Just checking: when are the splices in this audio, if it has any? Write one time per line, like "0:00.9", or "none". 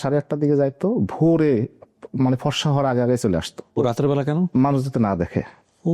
0:03.6